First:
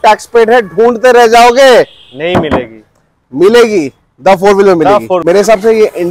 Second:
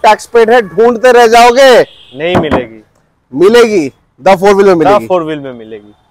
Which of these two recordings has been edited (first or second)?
first